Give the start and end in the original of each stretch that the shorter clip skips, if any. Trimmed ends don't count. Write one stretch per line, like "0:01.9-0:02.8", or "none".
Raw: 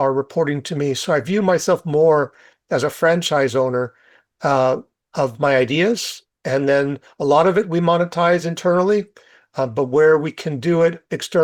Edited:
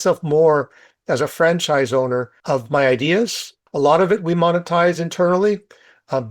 0:04.0-0:05.0
0:06.3-0:07.0